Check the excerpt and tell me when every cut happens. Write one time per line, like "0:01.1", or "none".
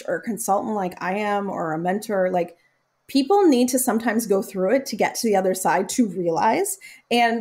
none